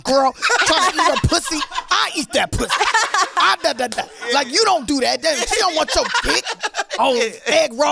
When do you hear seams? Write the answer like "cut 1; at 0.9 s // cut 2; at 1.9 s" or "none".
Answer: none